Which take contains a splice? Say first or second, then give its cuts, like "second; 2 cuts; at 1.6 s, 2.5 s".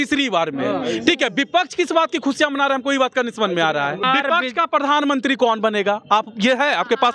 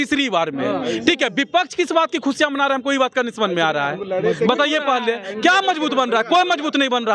first; 1 cut; at 4.0 s